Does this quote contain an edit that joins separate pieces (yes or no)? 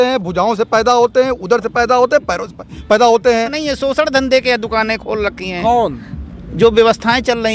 yes